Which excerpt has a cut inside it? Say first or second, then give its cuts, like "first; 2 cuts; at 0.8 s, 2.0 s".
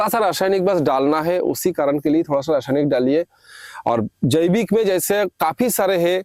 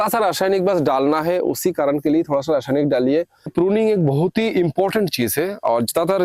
second; 1 cut; at 3.5 s